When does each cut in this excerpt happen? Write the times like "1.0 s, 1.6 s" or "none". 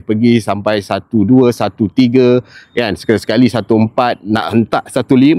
none

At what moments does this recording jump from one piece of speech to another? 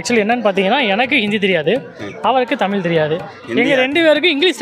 none

